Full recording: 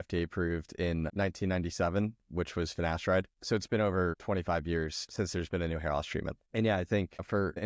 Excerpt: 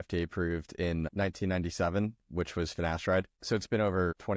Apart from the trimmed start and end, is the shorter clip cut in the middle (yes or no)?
no